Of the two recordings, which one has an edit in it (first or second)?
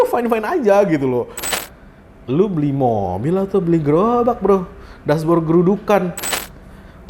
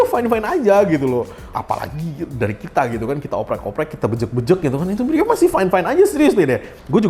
first